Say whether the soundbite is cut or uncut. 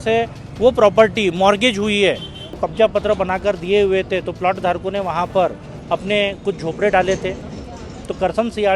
cut